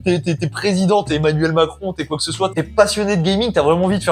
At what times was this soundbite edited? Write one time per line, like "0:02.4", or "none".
0:02.5

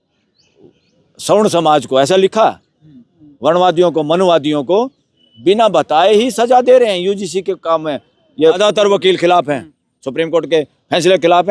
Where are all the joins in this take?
0:08.6

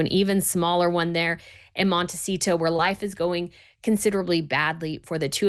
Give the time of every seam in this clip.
none

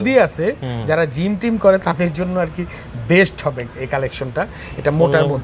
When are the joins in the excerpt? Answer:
none

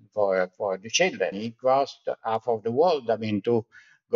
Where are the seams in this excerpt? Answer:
0:01.5

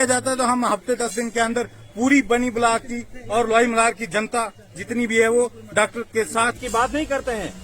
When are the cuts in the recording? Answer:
0:06.5

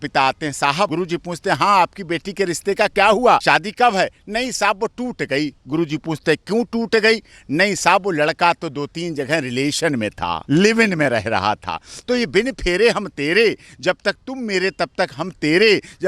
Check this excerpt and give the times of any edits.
0:00.9
0:03.4
0:10.4

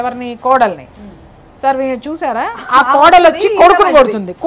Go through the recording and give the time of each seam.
none

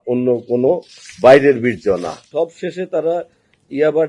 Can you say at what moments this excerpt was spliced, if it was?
0:02.2

